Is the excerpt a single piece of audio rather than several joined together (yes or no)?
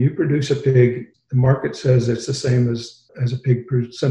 no